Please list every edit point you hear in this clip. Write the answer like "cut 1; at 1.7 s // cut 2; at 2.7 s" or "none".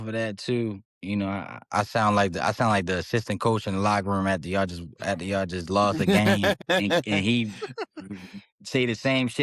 cut 1; at 0.9 s // cut 2; at 6.6 s